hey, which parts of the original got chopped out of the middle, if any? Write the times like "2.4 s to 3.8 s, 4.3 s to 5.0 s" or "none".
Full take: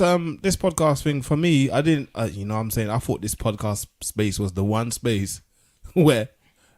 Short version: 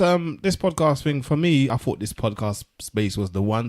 1.7 s to 2.9 s